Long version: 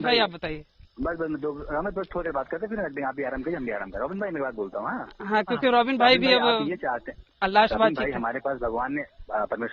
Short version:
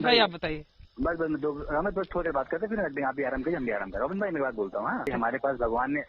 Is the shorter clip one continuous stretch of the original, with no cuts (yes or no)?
no